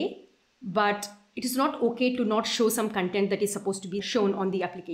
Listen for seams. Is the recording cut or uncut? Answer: cut